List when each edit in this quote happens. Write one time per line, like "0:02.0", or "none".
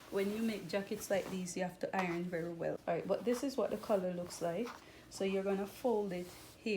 0:02.8